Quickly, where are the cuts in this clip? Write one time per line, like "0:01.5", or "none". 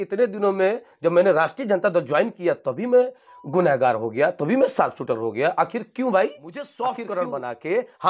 0:06.7